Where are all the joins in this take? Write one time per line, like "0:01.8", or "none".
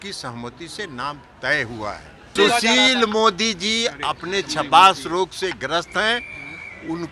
0:02.3